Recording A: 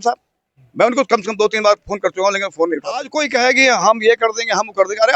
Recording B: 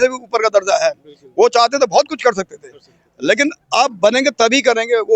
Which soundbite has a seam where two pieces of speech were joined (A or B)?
A